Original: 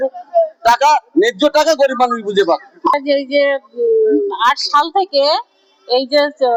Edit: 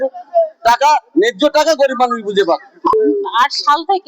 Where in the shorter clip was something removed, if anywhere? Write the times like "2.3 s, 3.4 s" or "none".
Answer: 2.9 s